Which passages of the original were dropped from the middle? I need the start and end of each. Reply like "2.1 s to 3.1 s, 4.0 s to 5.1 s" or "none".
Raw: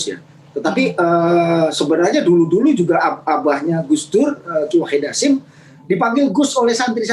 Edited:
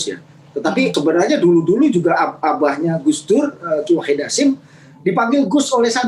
0.9 s to 1.8 s